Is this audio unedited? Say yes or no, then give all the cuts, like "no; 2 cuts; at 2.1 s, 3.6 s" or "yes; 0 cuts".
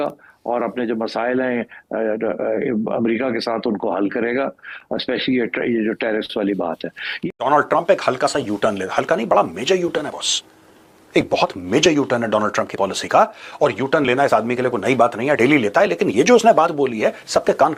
yes; 0 cuts